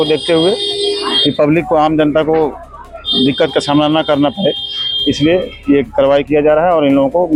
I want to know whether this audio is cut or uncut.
uncut